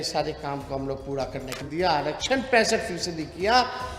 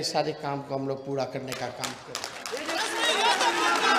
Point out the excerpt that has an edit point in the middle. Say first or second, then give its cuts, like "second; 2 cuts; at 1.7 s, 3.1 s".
first; 1 cut; at 1.6 s